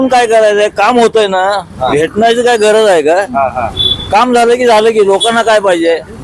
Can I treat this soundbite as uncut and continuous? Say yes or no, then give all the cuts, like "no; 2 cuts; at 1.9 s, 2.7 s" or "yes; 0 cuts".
yes; 0 cuts